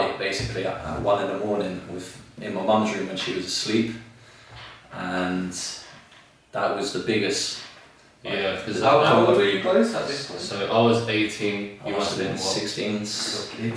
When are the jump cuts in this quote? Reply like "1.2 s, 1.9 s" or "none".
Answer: none